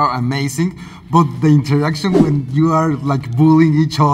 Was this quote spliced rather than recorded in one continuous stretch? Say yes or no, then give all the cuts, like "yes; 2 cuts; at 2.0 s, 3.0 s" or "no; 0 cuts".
no; 0 cuts